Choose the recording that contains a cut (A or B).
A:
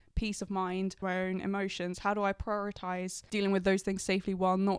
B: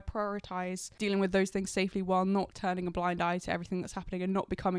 A